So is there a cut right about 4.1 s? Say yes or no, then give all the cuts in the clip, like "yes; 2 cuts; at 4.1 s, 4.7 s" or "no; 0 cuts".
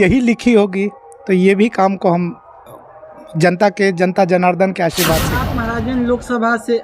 no; 1 cut; at 5.4 s